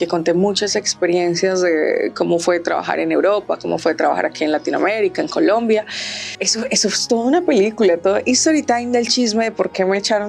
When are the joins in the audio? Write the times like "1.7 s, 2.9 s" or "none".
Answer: 6.5 s